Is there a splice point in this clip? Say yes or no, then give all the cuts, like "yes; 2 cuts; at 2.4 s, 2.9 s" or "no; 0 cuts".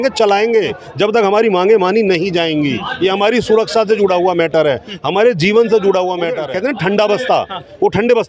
yes; 1 cut; at 6.5 s